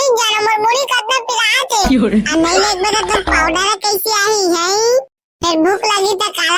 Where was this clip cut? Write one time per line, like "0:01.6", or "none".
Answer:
none